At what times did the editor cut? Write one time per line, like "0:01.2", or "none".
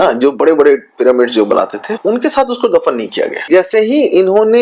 0:01.9
0:03.4